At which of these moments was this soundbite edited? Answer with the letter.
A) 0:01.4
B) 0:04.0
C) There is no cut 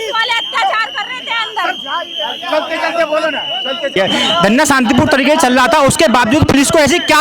B